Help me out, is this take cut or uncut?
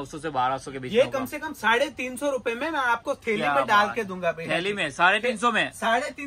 uncut